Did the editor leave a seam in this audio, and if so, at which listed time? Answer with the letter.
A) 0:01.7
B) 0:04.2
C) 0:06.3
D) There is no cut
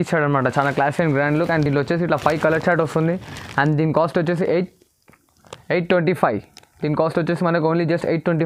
D